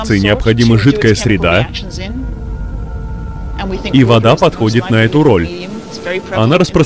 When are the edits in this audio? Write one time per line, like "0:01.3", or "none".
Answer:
none

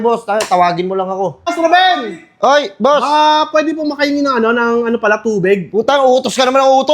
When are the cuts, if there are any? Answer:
0:01.5

